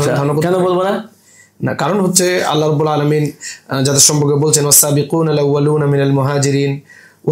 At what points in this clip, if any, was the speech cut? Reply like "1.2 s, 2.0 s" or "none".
none